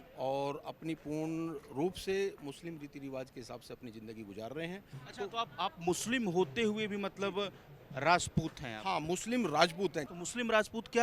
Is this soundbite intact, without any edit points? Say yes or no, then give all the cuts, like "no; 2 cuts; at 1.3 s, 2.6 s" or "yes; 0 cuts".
no; 2 cuts; at 5.0 s, 10.1 s